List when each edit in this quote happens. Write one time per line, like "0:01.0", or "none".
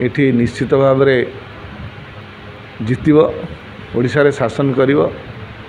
none